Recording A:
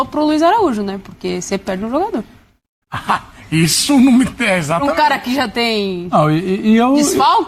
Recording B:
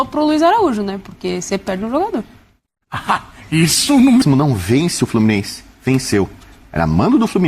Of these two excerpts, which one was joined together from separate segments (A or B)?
B